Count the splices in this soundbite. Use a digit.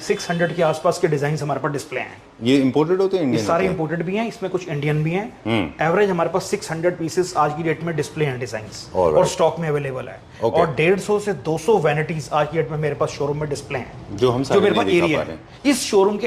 0